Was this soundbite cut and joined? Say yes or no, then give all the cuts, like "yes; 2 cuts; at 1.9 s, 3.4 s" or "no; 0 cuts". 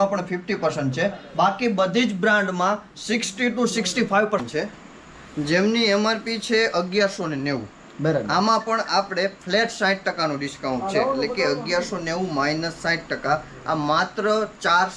yes; 1 cut; at 4.4 s